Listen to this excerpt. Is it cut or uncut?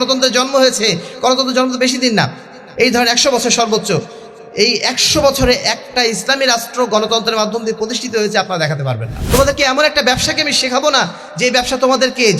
cut